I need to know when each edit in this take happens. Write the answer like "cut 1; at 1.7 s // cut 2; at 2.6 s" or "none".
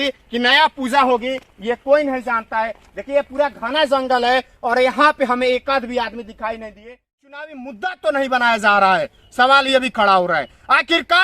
cut 1; at 7.2 s